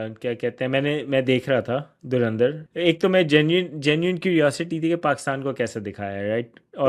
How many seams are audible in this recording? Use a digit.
1